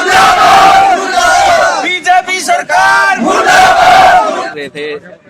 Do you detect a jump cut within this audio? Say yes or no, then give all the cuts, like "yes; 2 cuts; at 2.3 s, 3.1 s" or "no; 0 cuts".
yes; 1 cut; at 4.4 s